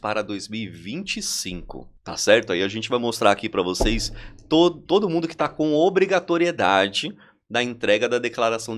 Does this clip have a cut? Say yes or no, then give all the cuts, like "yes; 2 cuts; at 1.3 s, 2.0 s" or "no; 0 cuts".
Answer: yes; 1 cut; at 1.9 s